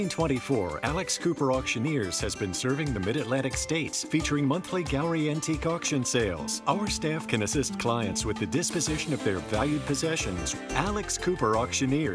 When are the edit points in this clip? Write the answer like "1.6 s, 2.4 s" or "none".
none

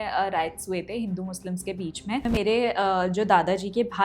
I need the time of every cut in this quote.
2.2 s

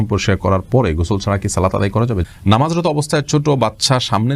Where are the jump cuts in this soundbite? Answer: 2.2 s

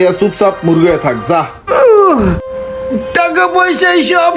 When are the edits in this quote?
1.6 s

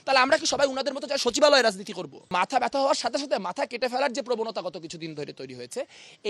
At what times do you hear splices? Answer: 2.3 s

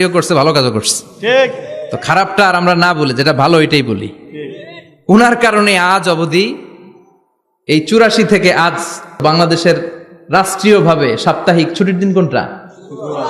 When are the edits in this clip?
9.2 s

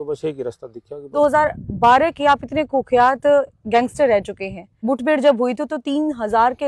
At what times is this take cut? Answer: 1.1 s, 4.7 s

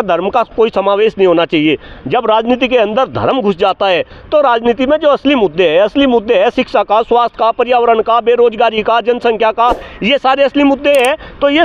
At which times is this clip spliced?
none

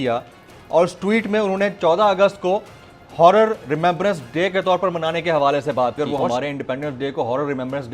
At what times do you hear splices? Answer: 6.0 s

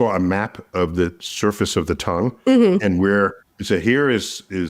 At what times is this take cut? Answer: none

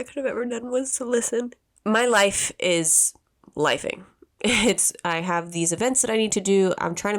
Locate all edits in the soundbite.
1.6 s

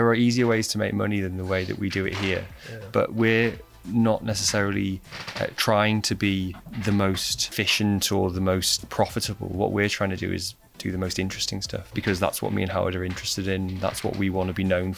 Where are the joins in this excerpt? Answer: 6.6 s, 7.4 s, 8.8 s, 11.9 s

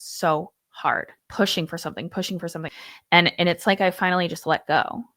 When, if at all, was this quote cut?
none

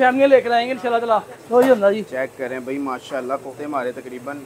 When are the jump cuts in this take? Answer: 1.3 s, 3.5 s

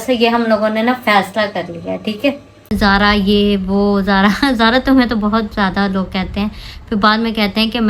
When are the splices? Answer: 2.7 s

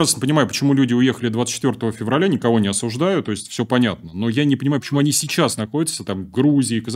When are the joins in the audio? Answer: none

